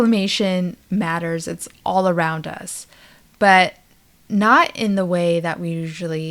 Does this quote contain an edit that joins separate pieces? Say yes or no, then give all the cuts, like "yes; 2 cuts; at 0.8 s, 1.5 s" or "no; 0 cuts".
no; 0 cuts